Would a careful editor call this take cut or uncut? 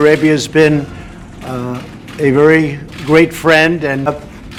uncut